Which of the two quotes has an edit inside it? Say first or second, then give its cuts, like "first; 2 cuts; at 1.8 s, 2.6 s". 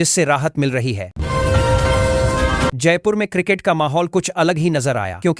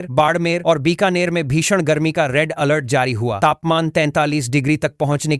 first; 2 cuts; at 1.1 s, 2.7 s